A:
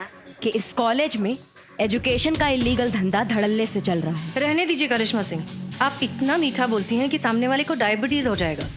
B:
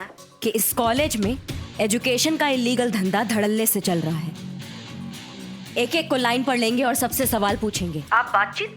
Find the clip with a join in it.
A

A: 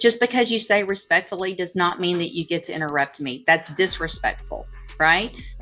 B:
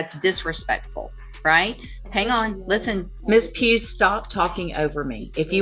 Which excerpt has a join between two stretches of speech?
B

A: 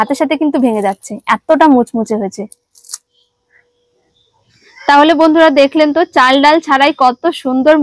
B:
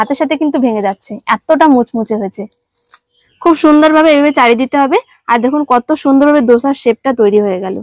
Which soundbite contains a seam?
B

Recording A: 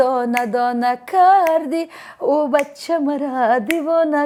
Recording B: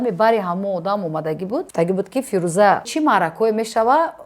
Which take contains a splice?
B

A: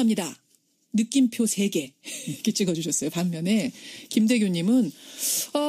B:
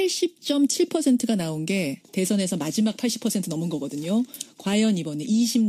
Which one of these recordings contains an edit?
B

